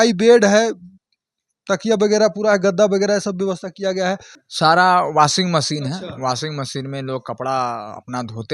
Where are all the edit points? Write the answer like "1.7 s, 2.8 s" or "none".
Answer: none